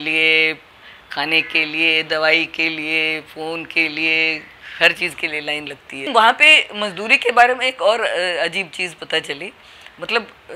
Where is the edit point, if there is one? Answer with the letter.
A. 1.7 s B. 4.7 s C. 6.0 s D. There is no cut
C